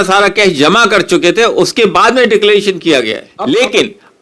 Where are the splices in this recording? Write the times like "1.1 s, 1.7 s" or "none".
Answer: 3.3 s